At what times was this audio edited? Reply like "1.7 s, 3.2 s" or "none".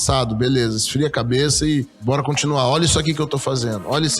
1.9 s